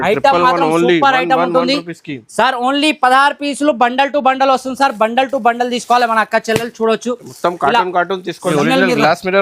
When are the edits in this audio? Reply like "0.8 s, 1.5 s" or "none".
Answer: 8.5 s